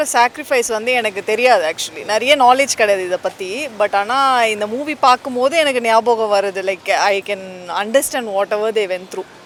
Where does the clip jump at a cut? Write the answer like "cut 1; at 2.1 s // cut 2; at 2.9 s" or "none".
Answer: none